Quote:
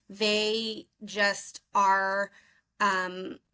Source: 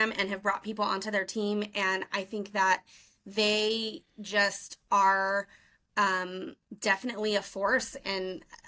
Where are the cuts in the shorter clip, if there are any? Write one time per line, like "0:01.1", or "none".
none